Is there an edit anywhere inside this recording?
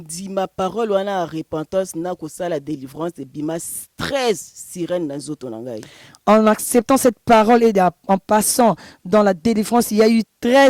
no; 0 cuts

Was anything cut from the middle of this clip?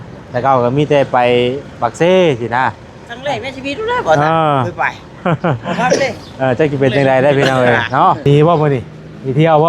yes; 1 cut; at 8.3 s

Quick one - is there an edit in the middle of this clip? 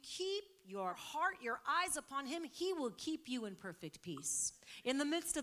yes; 1 cut; at 1.0 s

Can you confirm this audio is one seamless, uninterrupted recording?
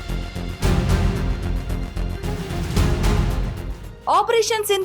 no; 1 cut; at 0.9 s

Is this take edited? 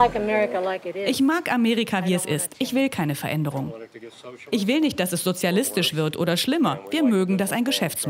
no; 0 cuts

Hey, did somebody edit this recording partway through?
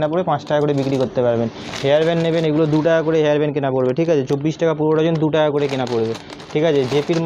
no; 0 cuts

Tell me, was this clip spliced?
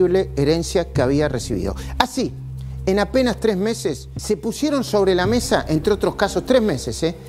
yes; 1 cut; at 4.1 s

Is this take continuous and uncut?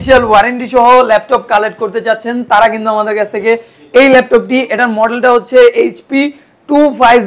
yes; 0 cuts

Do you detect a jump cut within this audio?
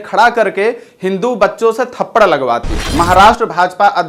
yes; 1 cut; at 2.8 s

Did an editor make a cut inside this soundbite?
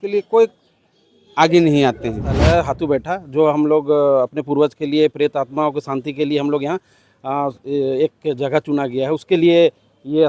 yes; 1 cut; at 2.3 s

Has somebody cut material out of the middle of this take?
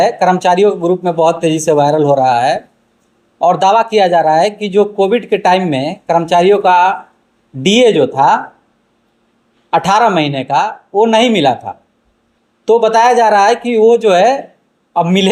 no; 0 cuts

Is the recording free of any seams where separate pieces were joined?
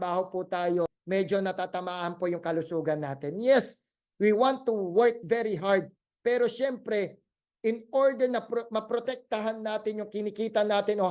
no; 1 cut; at 1.0 s

